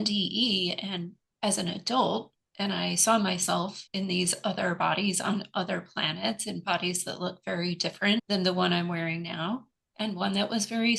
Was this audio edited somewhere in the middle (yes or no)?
yes